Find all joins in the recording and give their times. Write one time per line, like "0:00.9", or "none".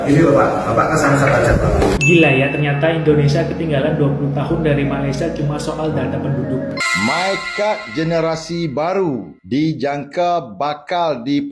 0:01.9
0:06.7